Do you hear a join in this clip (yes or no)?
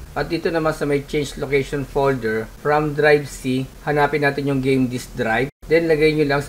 no